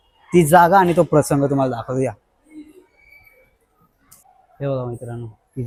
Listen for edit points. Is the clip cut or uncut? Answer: uncut